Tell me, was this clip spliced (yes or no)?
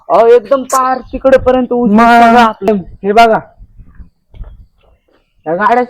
yes